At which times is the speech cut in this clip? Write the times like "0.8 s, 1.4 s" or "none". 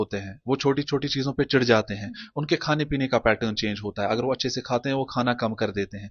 none